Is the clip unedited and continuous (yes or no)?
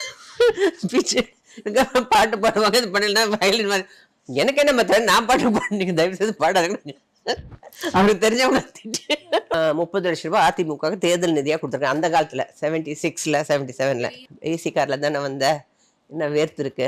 no